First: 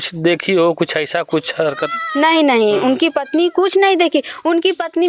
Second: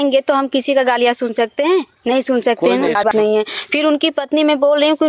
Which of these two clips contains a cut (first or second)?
second